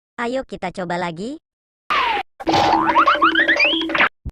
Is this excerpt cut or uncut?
cut